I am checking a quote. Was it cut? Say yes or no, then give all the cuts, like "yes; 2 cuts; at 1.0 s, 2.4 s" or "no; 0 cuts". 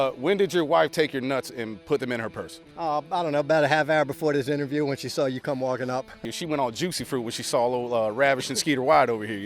yes; 2 cuts; at 1.8 s, 6.2 s